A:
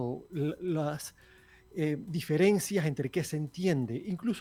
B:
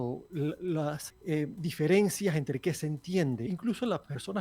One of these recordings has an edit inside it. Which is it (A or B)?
B